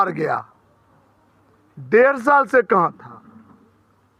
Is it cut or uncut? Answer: uncut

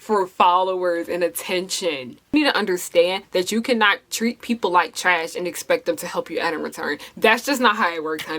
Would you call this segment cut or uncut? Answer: cut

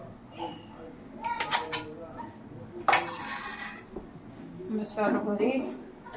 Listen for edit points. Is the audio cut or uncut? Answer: uncut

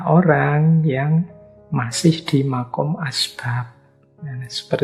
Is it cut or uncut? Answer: uncut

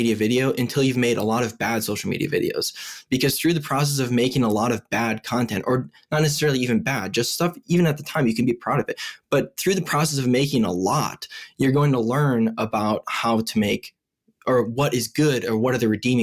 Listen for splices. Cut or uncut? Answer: uncut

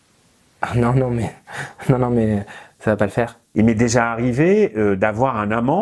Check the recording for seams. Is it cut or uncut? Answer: cut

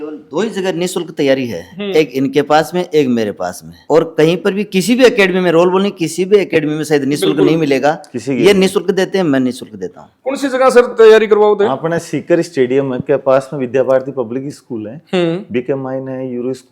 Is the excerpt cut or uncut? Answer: uncut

